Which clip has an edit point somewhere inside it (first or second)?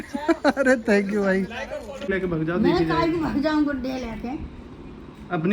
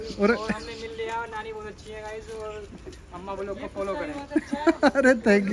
first